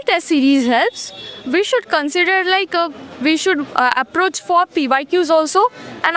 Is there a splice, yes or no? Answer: no